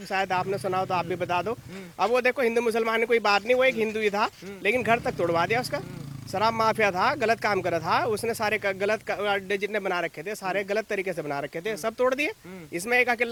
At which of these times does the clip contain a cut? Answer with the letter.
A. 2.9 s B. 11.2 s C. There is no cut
C